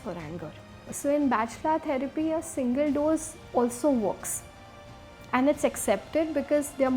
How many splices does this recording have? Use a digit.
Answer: 1